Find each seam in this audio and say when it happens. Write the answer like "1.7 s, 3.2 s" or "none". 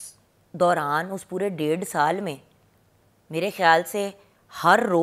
none